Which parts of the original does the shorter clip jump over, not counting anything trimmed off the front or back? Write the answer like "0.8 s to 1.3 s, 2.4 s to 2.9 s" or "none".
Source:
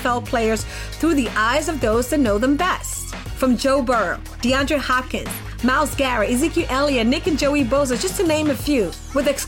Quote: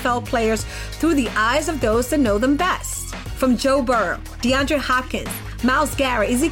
none